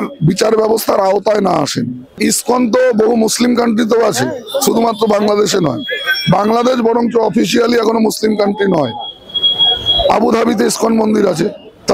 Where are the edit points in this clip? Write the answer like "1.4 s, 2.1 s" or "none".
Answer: 2.2 s